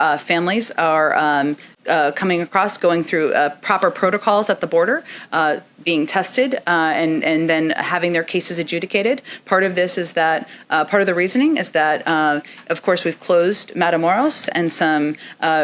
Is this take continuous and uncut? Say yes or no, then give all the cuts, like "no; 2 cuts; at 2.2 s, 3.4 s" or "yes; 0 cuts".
yes; 0 cuts